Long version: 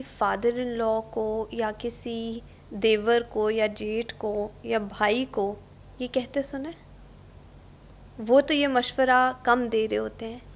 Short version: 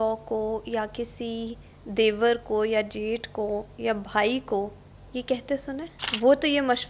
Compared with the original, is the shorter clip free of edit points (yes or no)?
no